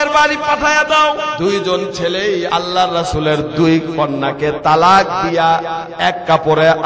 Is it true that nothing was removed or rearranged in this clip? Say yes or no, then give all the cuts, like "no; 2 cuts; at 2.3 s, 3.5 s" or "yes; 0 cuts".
no; 3 cuts; at 1.3 s, 2.5 s, 3.9 s